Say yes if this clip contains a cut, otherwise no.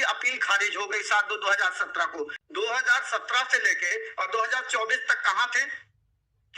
yes